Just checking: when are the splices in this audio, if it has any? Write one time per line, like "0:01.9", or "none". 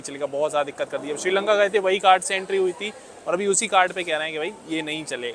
none